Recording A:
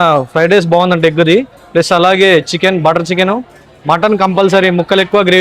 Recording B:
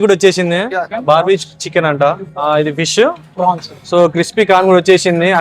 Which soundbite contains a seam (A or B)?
B